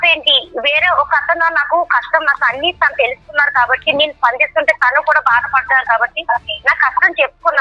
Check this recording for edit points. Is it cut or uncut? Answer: uncut